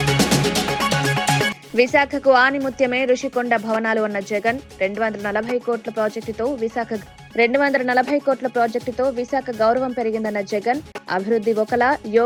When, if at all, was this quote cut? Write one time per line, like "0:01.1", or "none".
none